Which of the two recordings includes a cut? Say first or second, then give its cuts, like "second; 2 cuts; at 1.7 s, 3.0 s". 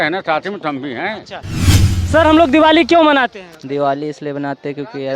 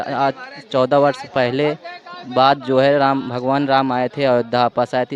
first; 1 cut; at 1.7 s